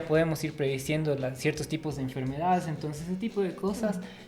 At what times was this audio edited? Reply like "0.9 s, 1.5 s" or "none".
none